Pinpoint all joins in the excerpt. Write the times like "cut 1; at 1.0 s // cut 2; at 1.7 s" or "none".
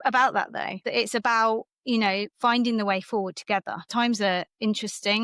cut 1; at 0.8 s // cut 2; at 3.9 s